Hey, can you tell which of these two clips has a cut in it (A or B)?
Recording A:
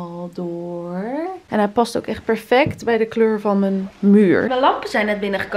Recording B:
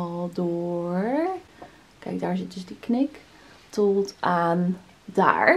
A